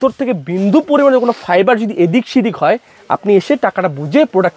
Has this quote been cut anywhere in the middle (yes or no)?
no